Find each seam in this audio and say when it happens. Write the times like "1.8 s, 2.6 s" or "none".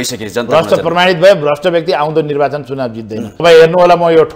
3.4 s